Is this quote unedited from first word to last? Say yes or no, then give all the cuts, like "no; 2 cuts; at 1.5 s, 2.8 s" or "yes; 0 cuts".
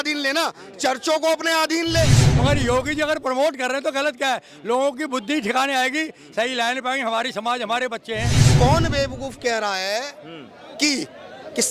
no; 2 cuts; at 2.2 s, 8.5 s